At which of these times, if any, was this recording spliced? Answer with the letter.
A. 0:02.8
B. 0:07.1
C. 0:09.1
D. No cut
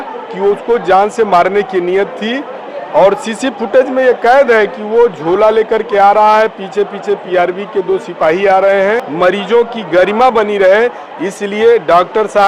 C